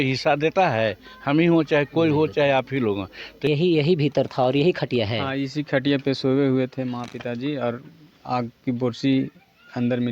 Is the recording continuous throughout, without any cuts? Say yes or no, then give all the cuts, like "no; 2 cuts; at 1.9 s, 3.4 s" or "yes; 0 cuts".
no; 1 cut; at 3.5 s